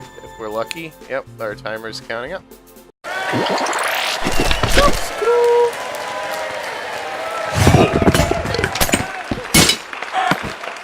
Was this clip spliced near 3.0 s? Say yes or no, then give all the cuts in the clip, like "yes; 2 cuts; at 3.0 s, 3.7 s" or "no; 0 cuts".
no; 0 cuts